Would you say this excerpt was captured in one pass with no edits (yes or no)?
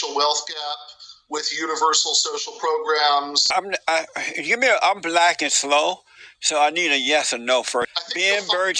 no